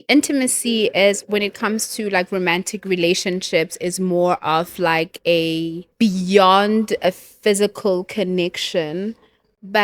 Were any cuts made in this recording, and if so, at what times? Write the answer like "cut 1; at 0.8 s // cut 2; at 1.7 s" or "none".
cut 1; at 5.8 s